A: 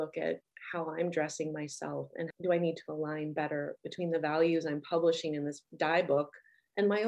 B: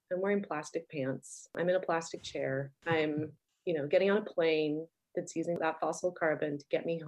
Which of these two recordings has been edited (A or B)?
B